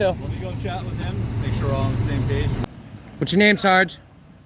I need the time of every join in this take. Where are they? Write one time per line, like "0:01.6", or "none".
0:02.6